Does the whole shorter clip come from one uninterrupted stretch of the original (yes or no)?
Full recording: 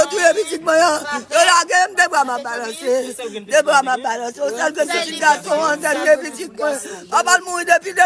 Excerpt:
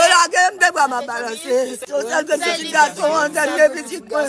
no